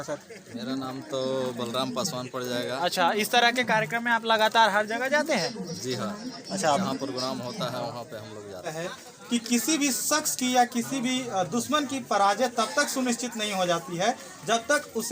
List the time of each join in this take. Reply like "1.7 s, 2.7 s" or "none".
8.7 s